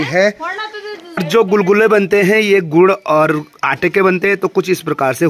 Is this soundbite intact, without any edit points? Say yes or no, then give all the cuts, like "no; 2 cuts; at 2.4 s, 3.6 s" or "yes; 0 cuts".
no; 1 cut; at 1.2 s